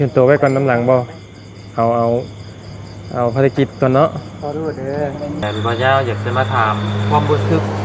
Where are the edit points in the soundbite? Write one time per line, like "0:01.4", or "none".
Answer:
0:05.4